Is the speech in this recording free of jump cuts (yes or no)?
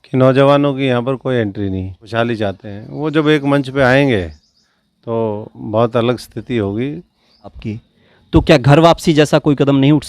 no